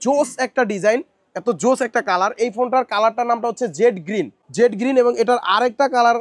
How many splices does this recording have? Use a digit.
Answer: 0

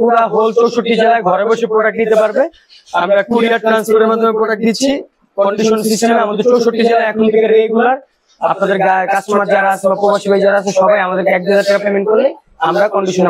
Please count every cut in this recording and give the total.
0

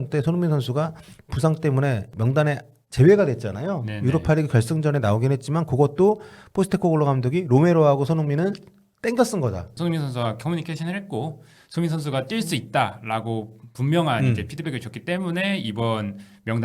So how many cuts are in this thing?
2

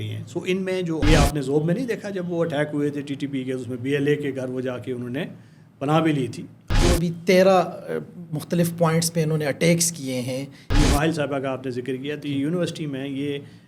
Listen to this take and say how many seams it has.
3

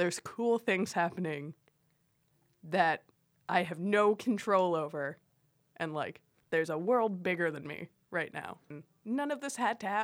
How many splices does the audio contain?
1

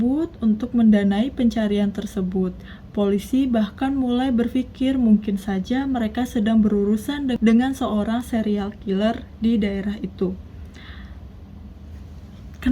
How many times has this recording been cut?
2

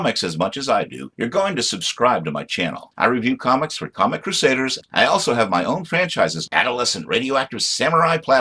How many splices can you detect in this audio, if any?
0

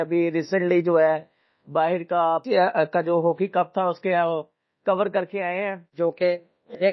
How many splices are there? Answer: 2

